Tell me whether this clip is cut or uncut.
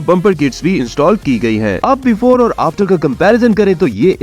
cut